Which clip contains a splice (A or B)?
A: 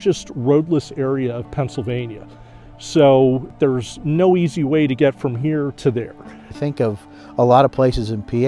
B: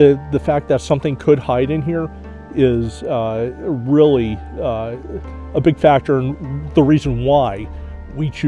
A